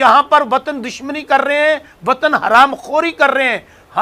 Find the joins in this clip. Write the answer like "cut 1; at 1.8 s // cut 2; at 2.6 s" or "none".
none